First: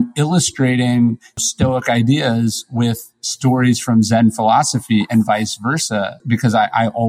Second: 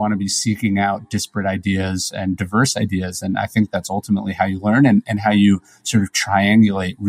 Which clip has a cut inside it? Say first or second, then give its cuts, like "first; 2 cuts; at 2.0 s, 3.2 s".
first; 2 cuts; at 1.4 s, 6.2 s